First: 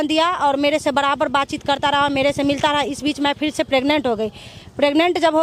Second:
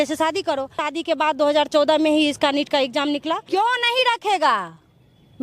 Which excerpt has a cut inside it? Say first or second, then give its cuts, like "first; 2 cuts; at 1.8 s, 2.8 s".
second; 2 cuts; at 0.9 s, 3.4 s